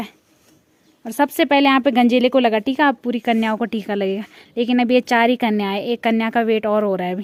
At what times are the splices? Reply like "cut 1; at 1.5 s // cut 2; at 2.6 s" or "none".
none

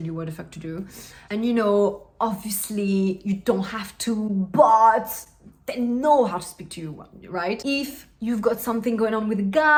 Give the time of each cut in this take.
none

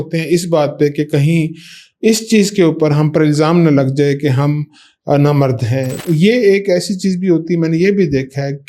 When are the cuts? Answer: cut 1; at 6.0 s

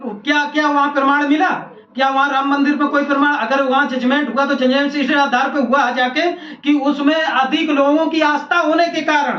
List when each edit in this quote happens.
none

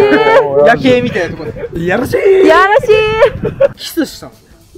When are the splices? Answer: cut 1; at 3.7 s

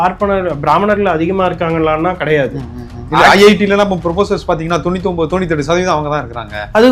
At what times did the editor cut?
none

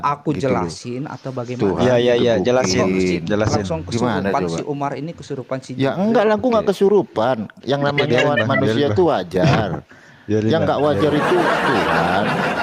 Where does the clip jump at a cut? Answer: none

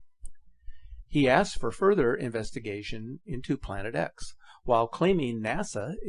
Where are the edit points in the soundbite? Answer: cut 1; at 3.2 s

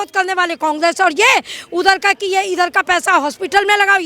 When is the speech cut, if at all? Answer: none

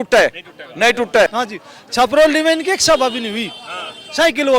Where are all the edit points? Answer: cut 1; at 1.3 s

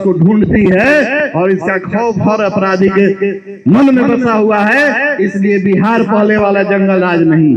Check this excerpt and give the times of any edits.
none

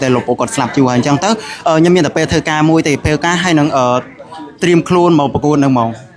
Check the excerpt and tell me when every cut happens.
none

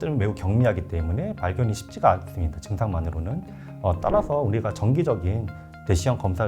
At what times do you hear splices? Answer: none

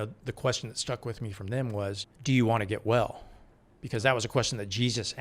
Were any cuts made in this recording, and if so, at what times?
cut 1; at 2.1 s

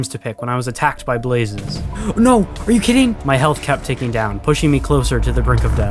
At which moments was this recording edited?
none

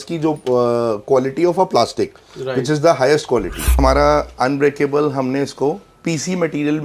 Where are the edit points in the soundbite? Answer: cut 1; at 3.8 s

